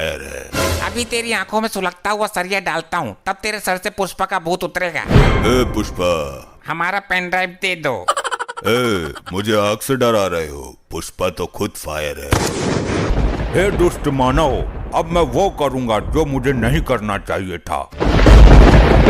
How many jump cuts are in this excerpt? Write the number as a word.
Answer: three